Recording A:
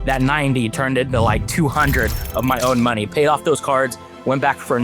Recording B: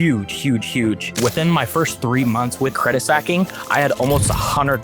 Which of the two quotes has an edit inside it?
B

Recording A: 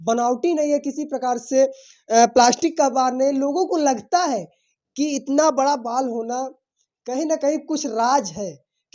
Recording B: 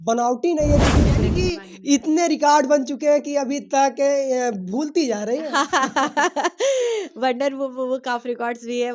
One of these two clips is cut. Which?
B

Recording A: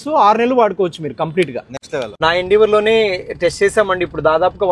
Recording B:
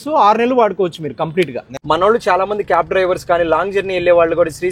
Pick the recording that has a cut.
B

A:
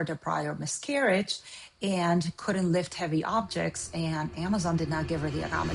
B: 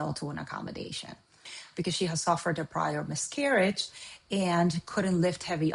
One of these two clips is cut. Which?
B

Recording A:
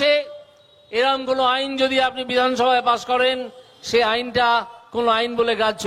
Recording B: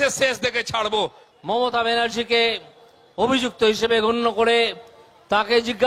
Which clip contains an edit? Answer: B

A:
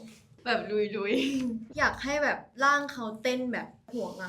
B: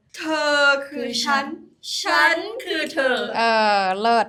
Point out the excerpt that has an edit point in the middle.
A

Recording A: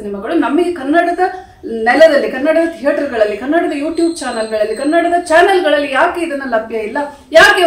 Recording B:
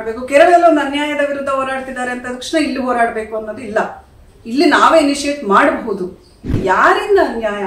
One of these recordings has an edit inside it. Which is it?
B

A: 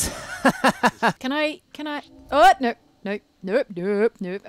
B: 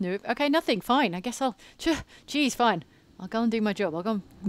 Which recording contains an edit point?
A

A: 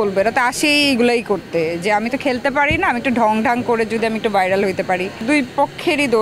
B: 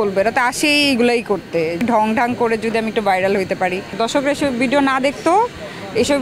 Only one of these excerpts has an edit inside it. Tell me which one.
B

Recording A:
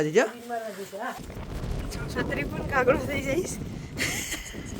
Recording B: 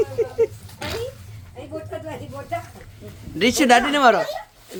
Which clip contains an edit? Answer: A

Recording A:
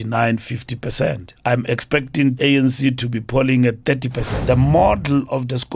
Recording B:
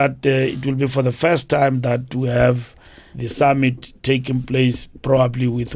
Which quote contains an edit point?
A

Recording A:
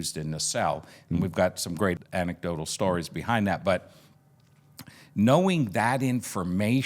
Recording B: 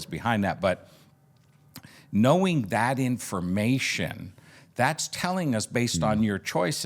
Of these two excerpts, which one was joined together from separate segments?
A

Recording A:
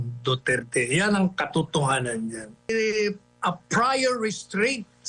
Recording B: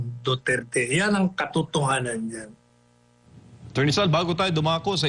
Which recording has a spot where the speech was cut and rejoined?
A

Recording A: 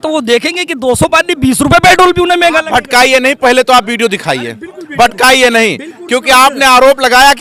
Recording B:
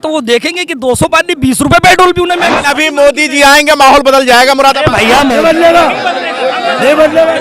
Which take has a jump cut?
B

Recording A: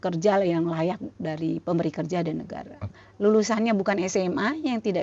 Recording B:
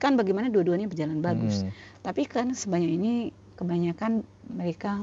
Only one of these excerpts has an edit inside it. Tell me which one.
A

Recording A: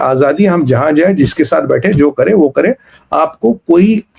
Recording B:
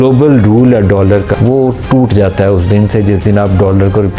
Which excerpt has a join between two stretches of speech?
B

